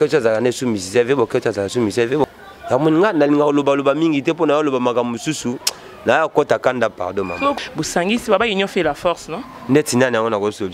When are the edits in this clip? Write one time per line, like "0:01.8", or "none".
0:02.3
0:07.5